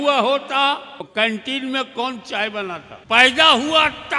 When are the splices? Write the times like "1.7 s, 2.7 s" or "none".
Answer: 1.1 s, 2.9 s